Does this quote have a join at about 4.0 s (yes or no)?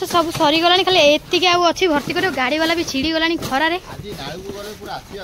no